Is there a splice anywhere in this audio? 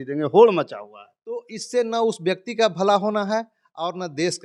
no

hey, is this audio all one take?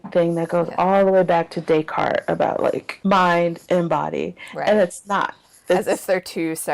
no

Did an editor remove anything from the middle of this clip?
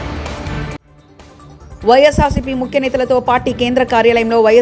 yes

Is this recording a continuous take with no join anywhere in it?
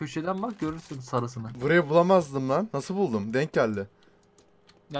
no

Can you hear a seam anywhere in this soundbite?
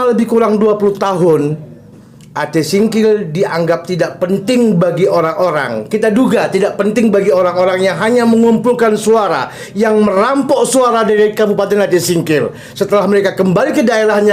no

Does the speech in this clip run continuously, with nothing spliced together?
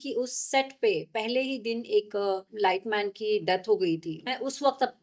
no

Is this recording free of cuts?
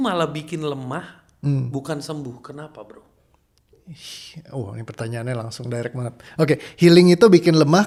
yes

